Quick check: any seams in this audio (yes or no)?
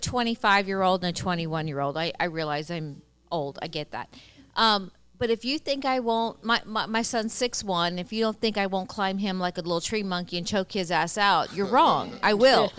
no